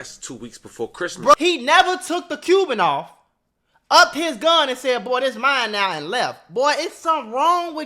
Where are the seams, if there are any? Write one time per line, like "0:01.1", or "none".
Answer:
0:01.3